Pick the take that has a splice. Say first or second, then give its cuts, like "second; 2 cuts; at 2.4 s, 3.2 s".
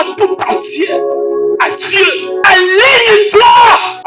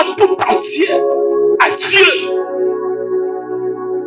first; 1 cut; at 2.4 s